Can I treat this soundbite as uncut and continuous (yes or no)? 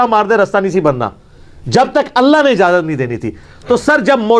yes